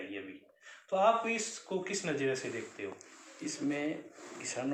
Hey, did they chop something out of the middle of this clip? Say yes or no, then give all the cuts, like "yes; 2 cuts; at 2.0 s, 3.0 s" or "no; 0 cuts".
no; 0 cuts